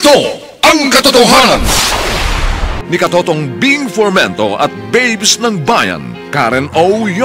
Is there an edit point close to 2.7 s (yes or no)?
yes